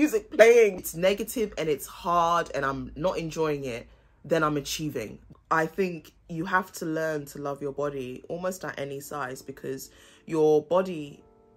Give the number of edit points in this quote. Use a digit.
2